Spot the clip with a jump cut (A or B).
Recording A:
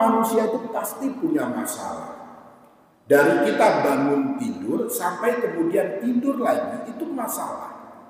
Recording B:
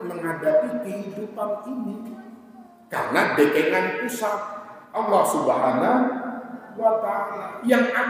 B